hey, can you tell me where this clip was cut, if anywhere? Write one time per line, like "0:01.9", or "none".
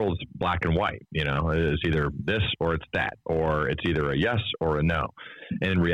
none